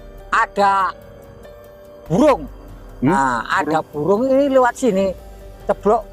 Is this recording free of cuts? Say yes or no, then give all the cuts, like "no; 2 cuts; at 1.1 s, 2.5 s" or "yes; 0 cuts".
yes; 0 cuts